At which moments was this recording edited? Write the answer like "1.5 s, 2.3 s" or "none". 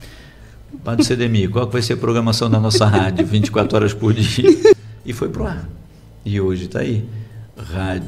4.8 s